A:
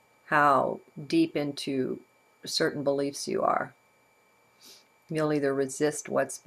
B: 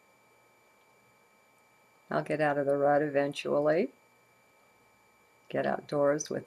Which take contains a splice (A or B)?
A